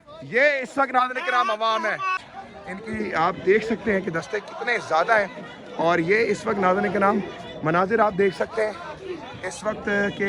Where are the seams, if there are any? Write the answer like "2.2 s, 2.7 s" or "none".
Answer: 2.2 s